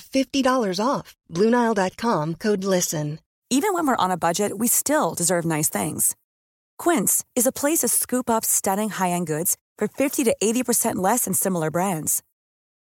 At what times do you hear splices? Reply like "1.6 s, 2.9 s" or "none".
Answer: 3.2 s